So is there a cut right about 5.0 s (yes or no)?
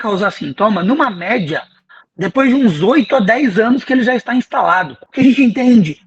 yes